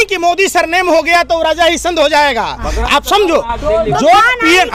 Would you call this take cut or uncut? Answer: uncut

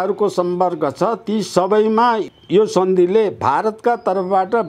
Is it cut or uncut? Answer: cut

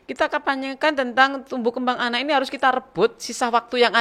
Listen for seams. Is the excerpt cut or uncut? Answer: uncut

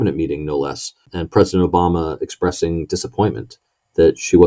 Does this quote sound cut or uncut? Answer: cut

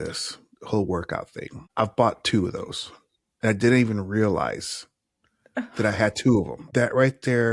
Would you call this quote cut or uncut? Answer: cut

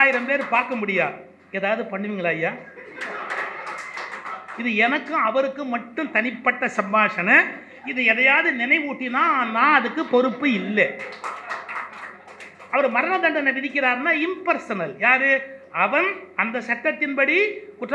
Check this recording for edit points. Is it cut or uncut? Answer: uncut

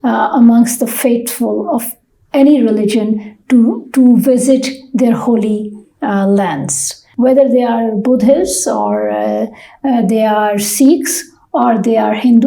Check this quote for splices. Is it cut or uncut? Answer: cut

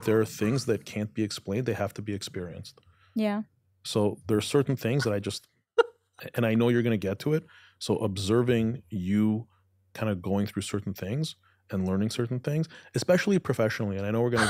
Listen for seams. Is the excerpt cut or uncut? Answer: uncut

